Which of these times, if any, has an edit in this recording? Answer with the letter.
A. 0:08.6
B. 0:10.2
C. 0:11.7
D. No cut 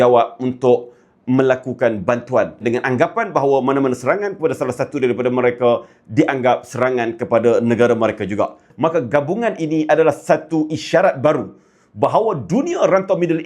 A